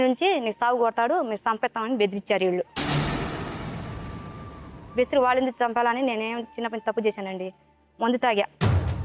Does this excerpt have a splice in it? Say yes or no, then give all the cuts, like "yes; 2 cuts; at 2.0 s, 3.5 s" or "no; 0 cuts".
no; 0 cuts